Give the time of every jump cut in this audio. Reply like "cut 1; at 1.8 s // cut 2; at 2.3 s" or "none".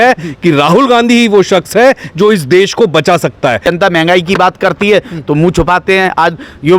cut 1; at 3.6 s